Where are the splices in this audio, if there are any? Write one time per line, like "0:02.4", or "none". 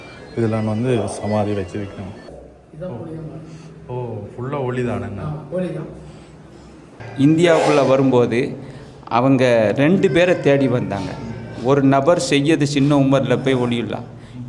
0:02.3
0:06.8